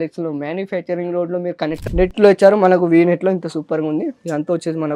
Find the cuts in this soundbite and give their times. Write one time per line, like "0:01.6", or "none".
0:01.8